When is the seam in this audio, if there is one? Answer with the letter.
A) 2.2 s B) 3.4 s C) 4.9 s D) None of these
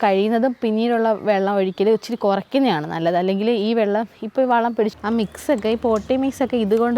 C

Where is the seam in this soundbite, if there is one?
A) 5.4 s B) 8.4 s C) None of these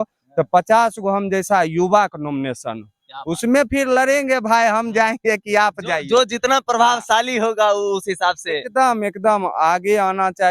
C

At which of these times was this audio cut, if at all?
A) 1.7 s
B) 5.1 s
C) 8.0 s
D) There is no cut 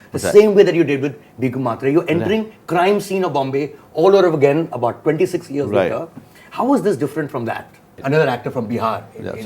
C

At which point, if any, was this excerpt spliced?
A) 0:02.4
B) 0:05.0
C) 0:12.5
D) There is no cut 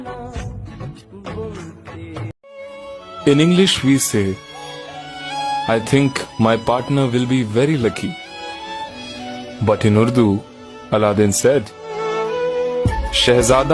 A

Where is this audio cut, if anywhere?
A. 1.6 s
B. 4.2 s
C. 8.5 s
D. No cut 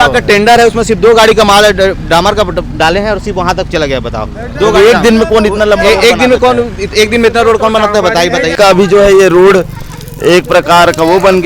C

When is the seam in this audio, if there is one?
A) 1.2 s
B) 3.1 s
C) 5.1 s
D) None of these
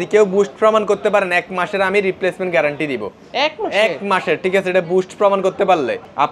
D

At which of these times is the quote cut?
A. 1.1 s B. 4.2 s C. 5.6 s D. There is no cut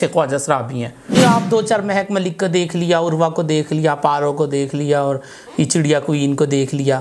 A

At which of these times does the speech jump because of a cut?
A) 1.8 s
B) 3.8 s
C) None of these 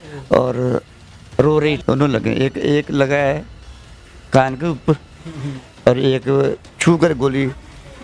A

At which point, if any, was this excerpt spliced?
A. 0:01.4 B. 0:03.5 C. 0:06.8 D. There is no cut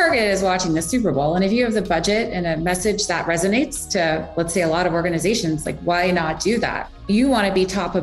C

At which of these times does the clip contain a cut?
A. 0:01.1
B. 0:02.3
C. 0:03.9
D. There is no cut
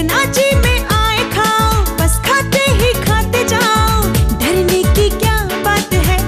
D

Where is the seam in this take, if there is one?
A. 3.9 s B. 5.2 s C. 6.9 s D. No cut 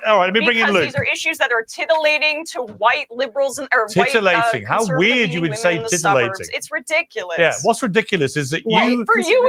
D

